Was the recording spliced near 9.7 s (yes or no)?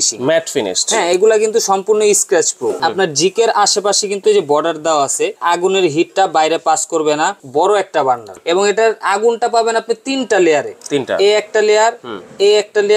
no